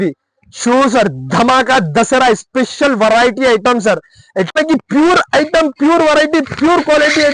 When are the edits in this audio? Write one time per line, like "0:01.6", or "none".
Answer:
0:04.5

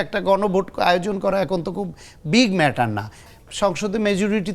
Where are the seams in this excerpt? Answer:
0:03.2

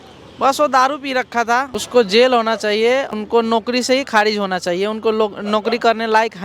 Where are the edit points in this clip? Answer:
0:01.8
0:03.2

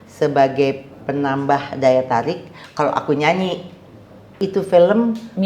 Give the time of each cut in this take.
0:04.2

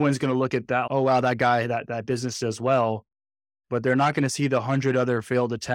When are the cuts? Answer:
none

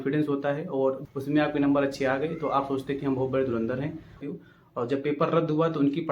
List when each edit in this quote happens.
0:01.0
0:04.2

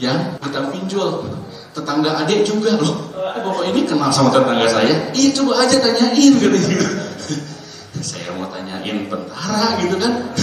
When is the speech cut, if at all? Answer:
none

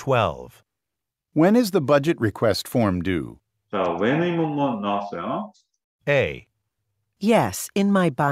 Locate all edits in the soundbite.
none

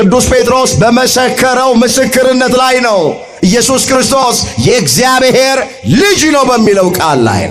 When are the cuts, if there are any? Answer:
none

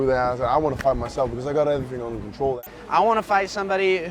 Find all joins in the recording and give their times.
0:02.6

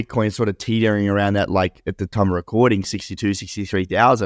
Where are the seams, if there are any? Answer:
none

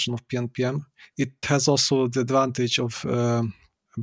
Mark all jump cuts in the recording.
0:01.4

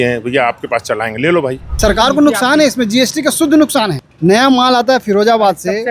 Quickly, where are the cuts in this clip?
0:01.8
0:04.0

